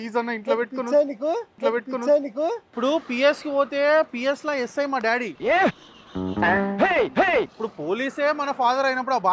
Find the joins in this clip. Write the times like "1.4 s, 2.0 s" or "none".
2.7 s, 7.5 s